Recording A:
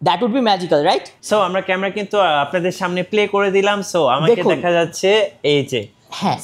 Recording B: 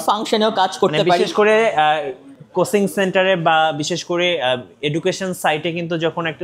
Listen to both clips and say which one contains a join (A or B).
A